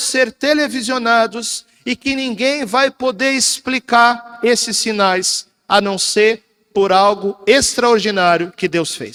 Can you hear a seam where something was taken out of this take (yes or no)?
no